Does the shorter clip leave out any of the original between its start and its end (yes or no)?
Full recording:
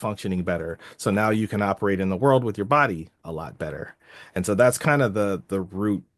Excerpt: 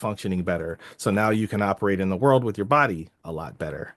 no